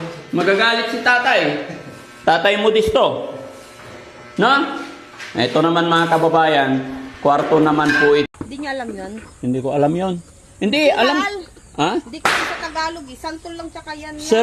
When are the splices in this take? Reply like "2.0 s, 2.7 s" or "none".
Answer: 8.3 s